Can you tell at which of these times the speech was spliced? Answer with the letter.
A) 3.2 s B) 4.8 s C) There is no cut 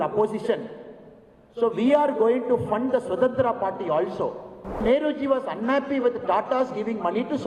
B